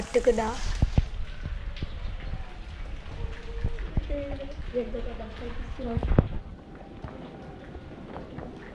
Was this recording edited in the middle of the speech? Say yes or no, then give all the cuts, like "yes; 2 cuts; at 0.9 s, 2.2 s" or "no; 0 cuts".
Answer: no; 0 cuts